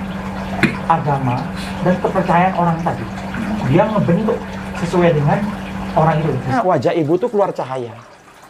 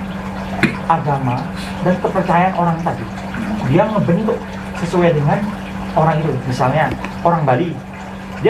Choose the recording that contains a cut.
first; 1 cut; at 6.5 s

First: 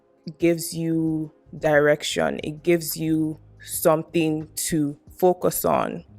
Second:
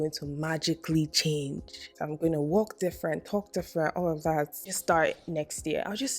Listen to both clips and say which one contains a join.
second; 2 cuts; at 1.9 s, 4.7 s

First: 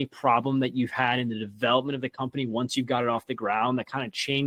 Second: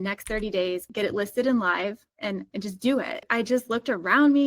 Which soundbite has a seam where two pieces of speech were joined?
second; 3 cuts; at 0.8 s, 2.1 s, 3.3 s

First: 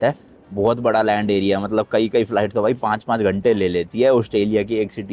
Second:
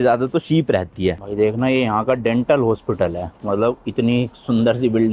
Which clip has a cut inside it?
second; 1 cut; at 1.2 s

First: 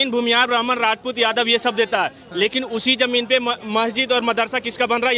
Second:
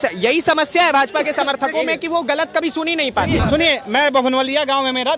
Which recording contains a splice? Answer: second; 1 cut; at 3.3 s

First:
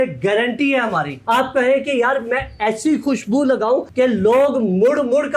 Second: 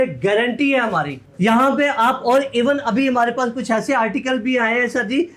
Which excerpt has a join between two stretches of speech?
first; 1 cut; at 1.1 s

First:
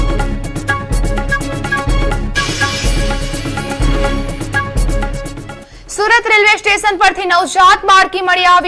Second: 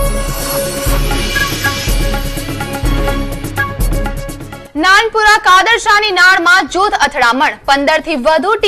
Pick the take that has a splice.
first; 1 cut; at 5.2 s

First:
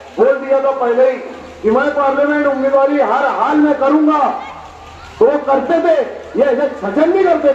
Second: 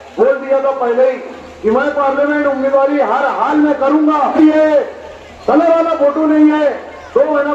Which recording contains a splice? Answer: second; 1 cut; at 4.3 s

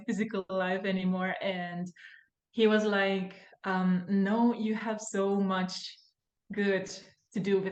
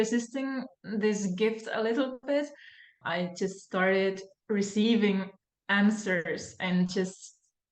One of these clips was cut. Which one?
second; 1 cut; at 3.0 s

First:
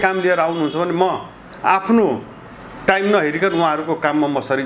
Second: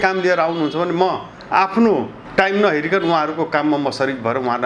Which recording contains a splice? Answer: second; 2 cuts; at 1.3 s, 2.2 s

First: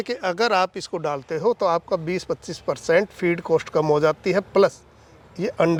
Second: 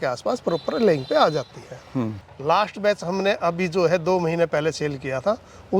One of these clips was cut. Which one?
second; 1 cut; at 2.2 s

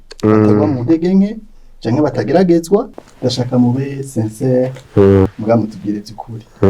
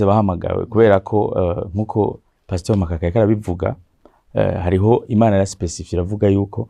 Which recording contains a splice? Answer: first; 2 cuts; at 3.0 s, 5.4 s

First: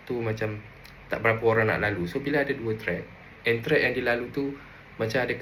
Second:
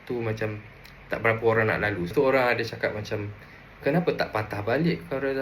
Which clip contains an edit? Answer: second; 1 cut; at 2.1 s

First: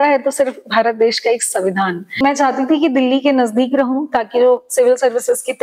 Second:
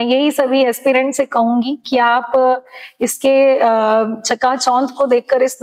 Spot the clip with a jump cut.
first; 1 cut; at 2.2 s

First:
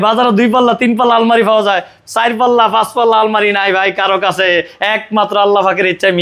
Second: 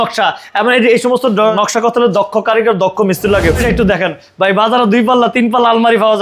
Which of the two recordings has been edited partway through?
second; 2 cuts; at 1.5 s, 3.6 s

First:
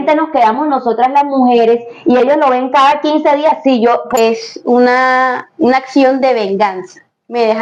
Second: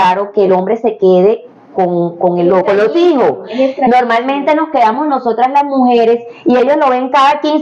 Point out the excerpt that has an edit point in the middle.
first; 1 cut; at 4.2 s

